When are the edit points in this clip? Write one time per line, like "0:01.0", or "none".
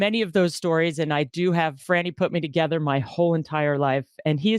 0:01.8